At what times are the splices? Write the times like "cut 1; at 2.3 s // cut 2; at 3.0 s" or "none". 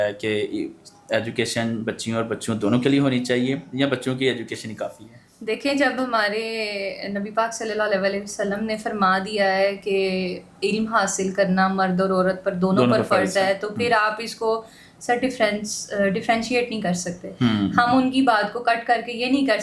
none